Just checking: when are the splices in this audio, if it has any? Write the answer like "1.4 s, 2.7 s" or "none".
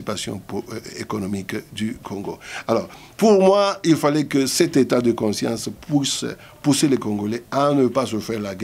none